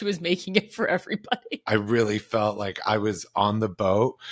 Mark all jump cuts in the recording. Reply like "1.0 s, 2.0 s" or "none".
1.6 s

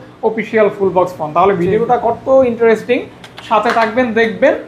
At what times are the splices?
none

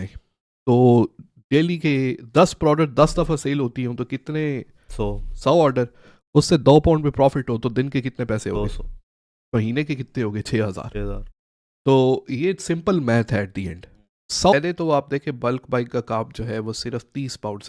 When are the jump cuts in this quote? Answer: 14.5 s

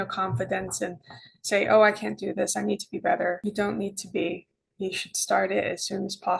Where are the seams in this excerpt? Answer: none

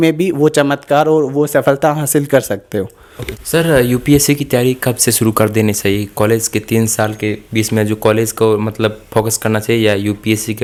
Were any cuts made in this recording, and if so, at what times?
none

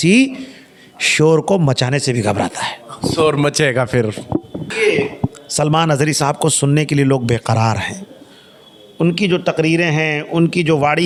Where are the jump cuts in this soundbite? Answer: none

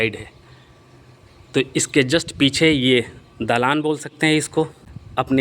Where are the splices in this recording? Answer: 4.5 s

